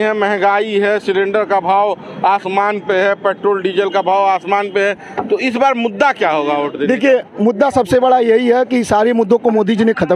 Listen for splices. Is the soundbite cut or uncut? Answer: uncut